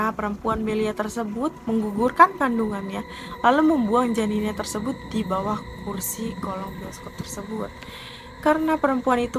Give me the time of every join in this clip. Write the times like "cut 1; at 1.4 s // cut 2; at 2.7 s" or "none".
none